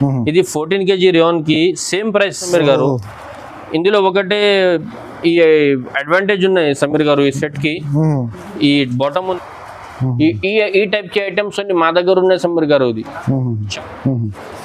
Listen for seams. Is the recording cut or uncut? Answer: cut